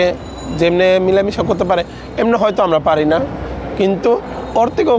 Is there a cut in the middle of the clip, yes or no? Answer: no